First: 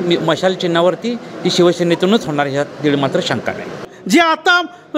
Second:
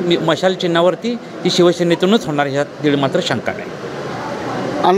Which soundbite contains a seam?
first; 1 cut; at 3.9 s

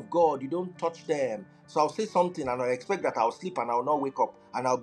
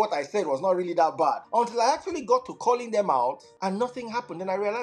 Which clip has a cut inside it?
second; 2 cuts; at 1.4 s, 3.5 s

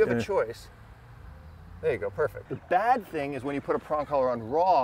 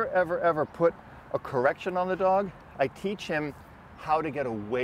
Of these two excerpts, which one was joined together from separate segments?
first; 1 cut; at 2.4 s

